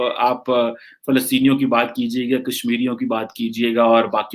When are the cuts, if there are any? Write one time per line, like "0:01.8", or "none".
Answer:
none